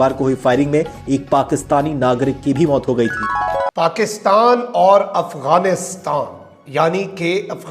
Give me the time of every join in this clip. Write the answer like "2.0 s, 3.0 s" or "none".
3.6 s